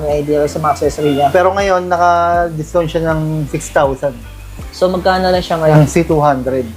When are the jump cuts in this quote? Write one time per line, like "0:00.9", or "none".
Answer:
0:01.3
0:05.7